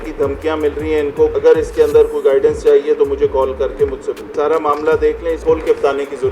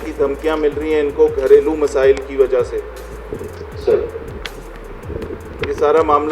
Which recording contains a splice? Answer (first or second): first